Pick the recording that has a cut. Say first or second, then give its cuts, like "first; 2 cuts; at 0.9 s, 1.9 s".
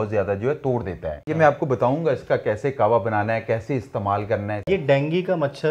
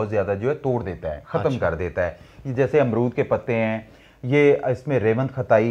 first; 2 cuts; at 1.1 s, 4.7 s